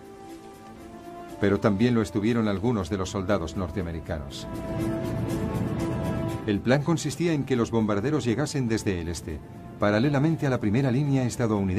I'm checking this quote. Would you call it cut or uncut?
uncut